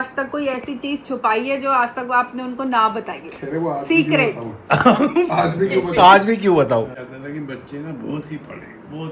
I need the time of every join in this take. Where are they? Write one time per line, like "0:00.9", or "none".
0:06.9